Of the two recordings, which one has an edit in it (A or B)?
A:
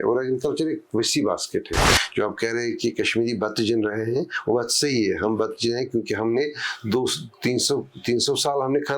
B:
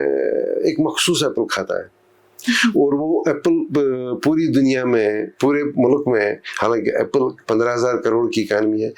A